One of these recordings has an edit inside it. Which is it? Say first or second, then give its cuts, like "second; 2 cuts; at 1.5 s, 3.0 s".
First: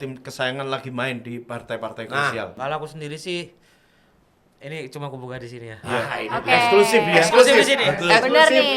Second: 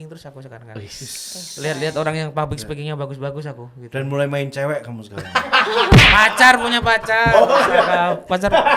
first; 1 cut; at 2.5 s